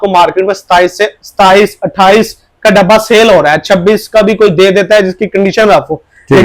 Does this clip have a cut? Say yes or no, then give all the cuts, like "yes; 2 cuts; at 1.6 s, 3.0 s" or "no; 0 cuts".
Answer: no; 0 cuts